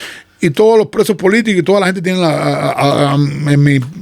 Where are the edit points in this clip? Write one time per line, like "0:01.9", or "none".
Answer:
none